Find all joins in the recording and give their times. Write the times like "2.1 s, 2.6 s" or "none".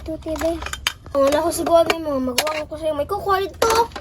1.1 s